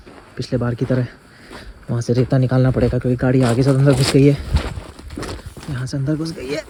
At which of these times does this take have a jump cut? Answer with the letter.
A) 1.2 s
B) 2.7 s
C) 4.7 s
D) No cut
D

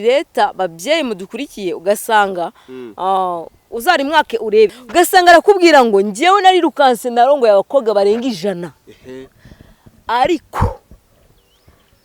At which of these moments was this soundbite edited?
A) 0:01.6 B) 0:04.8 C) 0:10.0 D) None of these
B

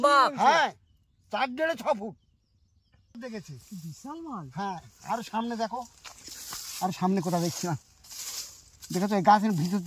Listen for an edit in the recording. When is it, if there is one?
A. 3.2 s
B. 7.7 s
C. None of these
A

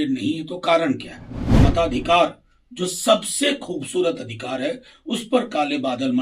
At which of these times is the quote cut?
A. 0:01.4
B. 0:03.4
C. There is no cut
A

